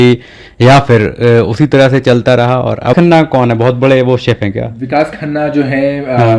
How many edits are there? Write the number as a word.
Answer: one